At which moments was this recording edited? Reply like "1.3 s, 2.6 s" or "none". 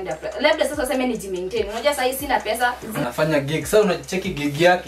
2.9 s